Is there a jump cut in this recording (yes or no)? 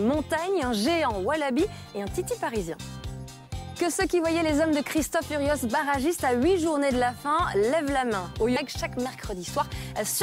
no